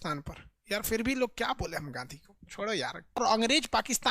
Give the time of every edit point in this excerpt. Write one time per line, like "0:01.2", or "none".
0:03.2